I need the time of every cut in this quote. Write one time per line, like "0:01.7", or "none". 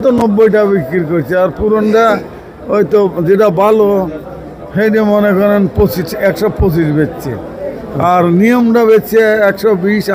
none